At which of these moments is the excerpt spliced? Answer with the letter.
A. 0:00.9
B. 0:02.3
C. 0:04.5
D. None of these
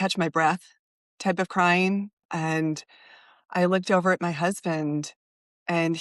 B